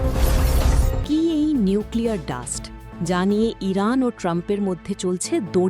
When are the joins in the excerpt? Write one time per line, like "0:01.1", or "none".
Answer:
0:00.9